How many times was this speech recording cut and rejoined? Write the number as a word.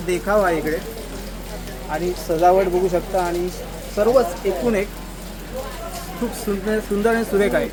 zero